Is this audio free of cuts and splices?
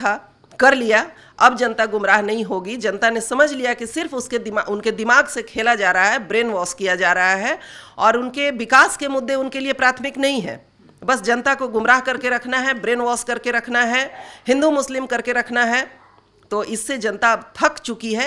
yes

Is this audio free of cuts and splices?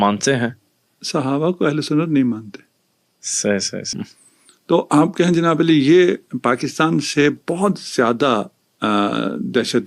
no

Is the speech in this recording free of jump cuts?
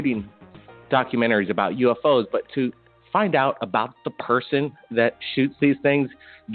yes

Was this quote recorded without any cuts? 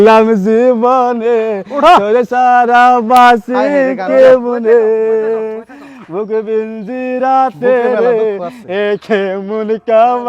yes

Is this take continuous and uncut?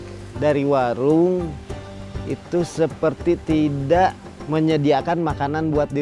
yes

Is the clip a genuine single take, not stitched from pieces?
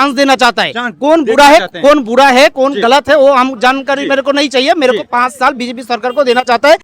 yes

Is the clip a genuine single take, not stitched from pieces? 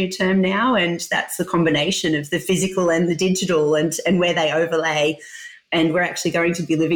yes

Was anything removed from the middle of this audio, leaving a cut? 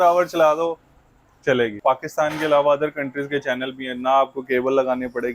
yes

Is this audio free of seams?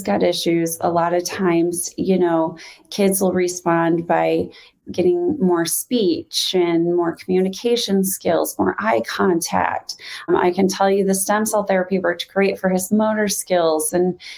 yes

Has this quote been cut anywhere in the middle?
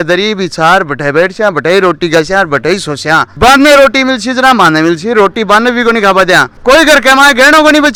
no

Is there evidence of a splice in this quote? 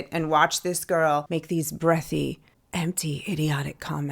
yes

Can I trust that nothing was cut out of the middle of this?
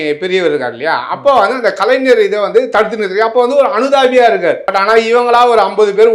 no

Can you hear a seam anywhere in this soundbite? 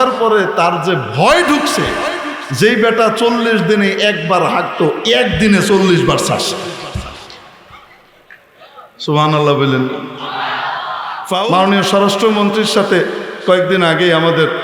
yes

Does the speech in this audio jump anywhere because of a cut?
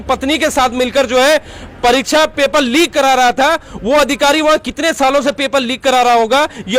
no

